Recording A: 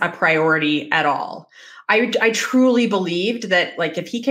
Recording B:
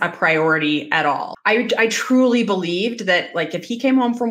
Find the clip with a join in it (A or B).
B